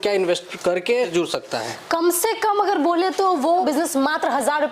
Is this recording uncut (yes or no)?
no